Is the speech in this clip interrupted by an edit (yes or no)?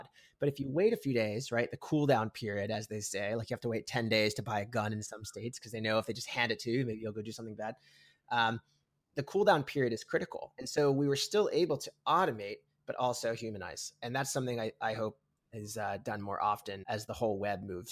yes